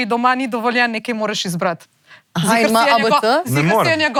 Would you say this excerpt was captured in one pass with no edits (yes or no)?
yes